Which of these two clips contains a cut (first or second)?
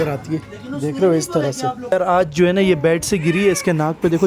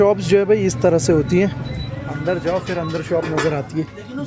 first